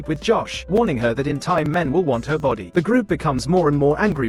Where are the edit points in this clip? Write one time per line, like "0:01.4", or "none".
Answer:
none